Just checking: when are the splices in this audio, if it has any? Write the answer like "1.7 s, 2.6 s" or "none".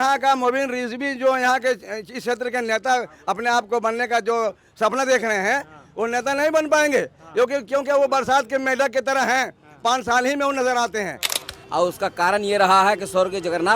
11.3 s